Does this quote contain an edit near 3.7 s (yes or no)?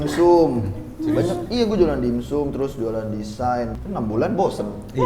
yes